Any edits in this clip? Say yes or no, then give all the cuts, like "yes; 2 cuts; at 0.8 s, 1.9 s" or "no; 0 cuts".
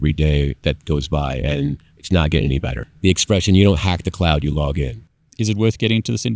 yes; 2 cuts; at 2.8 s, 5.3 s